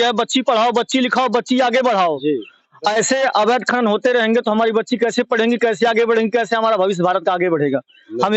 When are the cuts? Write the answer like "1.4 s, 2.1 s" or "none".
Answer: none